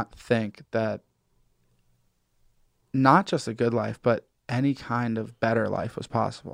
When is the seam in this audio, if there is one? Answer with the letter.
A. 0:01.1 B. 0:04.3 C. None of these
C